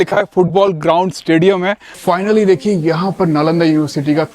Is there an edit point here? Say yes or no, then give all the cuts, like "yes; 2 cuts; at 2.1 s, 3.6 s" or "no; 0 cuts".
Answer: yes; 1 cut; at 1.9 s